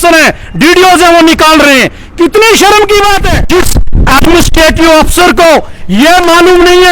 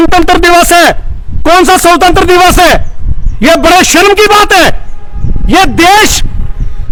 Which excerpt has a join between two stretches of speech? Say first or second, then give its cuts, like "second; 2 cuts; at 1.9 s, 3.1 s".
first; 1 cut; at 3.3 s